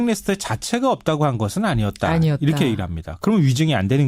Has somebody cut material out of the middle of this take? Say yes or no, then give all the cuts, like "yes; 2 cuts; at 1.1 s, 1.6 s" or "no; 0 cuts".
no; 0 cuts